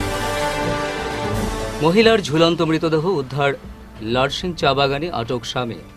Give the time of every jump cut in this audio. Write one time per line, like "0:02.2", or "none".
0:01.4